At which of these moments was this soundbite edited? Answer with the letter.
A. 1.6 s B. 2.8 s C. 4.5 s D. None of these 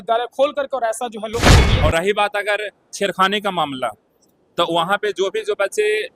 A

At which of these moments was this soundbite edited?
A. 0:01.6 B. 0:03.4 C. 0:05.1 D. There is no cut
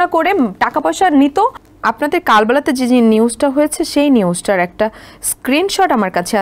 A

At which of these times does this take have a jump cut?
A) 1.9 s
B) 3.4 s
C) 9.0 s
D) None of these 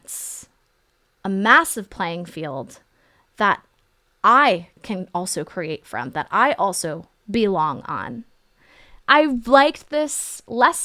C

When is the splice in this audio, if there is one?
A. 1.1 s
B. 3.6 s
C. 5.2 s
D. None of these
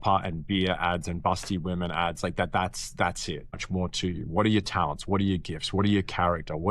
B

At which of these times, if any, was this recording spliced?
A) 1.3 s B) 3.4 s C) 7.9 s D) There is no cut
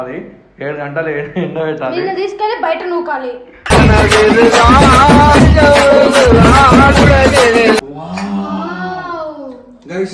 C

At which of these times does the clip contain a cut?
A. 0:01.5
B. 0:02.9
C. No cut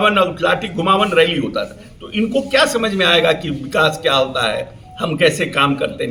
C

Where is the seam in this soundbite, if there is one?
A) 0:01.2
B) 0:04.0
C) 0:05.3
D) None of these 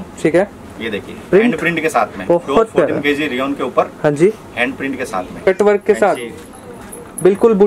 C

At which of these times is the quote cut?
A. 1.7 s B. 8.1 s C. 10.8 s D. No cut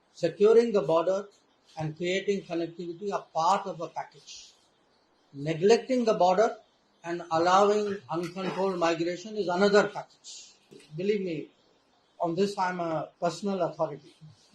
C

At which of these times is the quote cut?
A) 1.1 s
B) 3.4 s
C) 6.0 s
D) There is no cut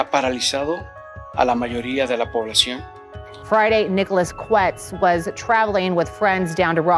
B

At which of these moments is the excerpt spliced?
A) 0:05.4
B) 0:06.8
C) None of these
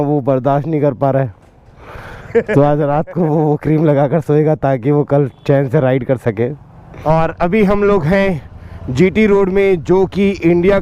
B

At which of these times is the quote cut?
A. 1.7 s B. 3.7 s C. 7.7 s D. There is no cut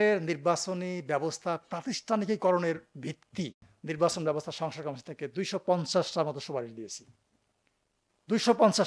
B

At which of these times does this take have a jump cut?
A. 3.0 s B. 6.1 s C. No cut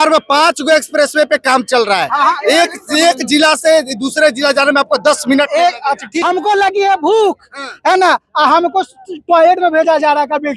B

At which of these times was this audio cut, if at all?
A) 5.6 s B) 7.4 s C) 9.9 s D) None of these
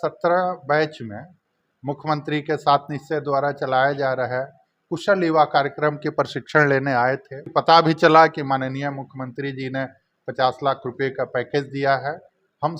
B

